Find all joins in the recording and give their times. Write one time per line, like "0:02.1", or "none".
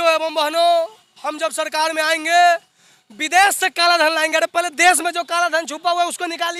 none